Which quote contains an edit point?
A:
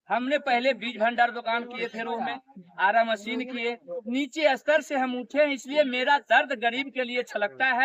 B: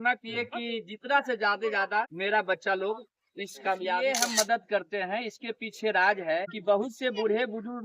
B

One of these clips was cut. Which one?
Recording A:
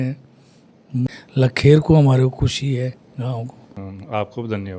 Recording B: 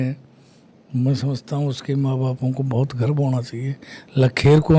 A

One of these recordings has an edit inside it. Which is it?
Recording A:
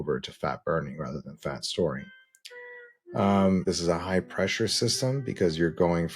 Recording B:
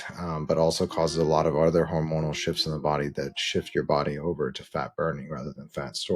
A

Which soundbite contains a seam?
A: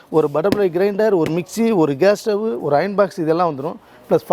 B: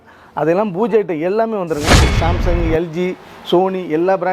B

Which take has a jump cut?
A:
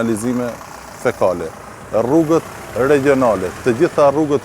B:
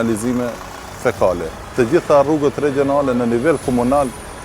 B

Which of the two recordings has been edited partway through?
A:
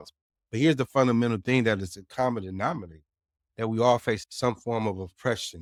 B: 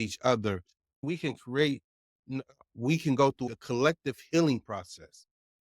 B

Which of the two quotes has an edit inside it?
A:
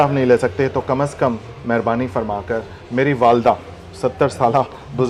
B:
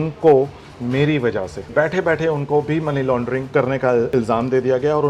B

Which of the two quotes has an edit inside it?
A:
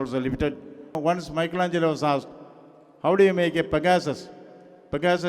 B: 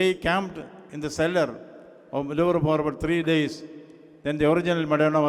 A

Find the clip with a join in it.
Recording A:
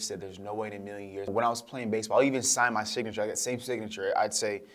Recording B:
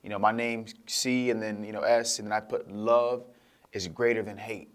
A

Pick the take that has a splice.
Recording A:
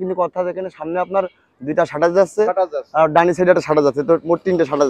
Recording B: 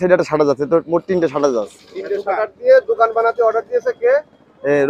A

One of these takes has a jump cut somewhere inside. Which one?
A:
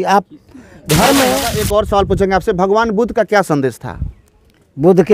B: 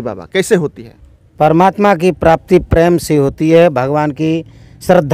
A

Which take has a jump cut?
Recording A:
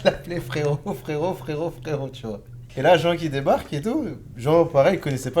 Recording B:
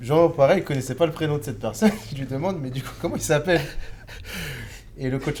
A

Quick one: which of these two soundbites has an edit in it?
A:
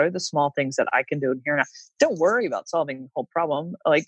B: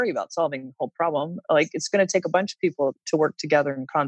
B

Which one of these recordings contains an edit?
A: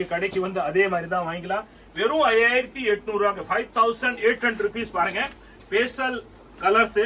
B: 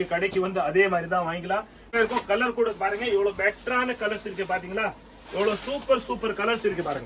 B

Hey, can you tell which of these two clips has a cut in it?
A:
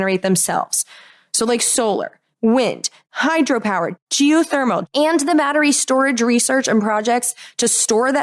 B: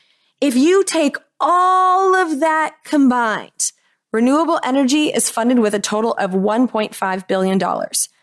A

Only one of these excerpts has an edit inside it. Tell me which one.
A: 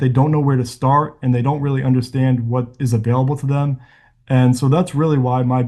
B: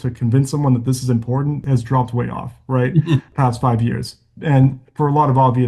B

